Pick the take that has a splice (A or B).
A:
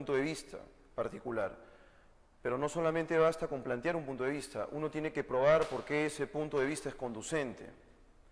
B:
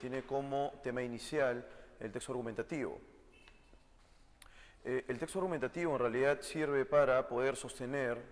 B